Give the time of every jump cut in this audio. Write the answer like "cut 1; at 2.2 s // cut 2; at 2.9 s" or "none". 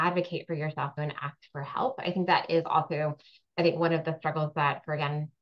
cut 1; at 0.9 s